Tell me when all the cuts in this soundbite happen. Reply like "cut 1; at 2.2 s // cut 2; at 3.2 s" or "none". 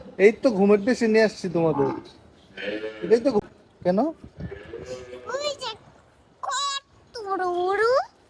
cut 1; at 3.4 s